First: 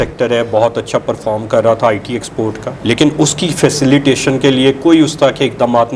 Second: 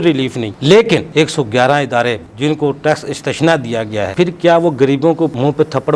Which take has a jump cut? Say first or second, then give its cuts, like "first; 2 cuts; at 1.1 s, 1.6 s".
second; 3 cuts; at 1.1 s, 2.2 s, 4.1 s